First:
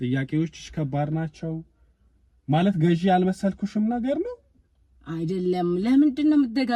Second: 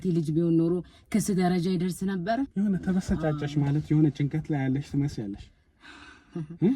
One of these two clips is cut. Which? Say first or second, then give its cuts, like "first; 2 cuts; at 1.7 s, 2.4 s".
second; 1 cut; at 2.5 s